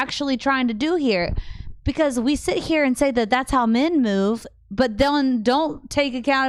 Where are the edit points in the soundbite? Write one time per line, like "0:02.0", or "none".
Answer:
none